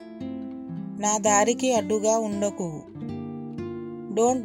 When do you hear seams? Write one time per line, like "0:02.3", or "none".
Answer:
0:01.0